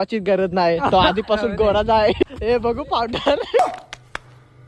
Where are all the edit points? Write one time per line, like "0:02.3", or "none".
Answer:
0:02.2
0:03.6